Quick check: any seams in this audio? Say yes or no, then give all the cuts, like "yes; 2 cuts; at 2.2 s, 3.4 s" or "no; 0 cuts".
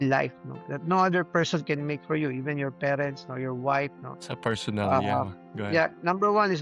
no; 0 cuts